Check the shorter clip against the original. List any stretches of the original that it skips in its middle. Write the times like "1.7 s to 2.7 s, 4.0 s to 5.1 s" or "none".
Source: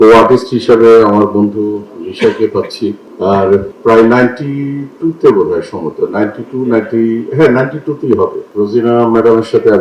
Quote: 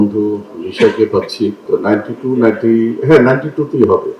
3.0 s to 5.9 s

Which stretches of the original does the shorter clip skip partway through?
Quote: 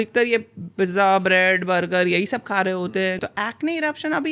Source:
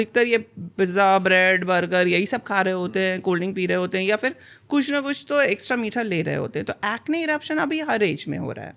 3.2 s to 6.7 s

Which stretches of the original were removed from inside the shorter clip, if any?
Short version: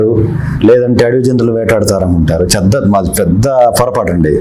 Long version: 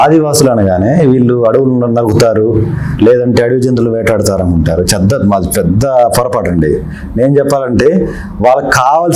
none

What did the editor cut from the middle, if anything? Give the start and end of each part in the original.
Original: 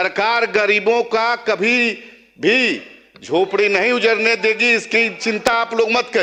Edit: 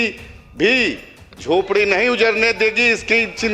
none

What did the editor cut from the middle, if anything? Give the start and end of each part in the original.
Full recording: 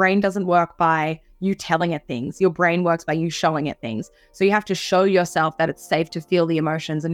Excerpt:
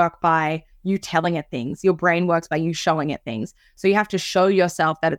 none

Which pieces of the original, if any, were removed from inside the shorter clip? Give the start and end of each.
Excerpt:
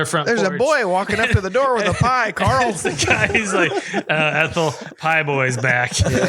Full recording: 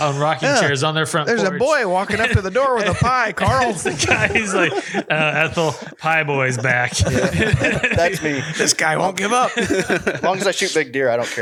none

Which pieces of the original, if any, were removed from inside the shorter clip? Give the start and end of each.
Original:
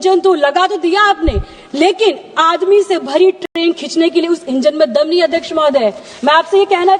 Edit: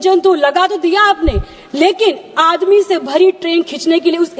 3.4 s to 3.5 s

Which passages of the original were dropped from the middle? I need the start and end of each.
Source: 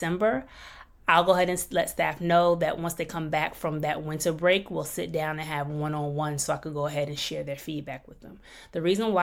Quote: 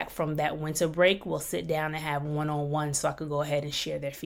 none

